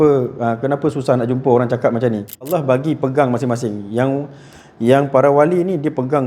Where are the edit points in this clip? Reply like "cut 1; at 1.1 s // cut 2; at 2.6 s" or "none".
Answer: cut 1; at 2.5 s